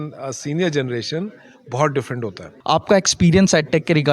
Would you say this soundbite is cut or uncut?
cut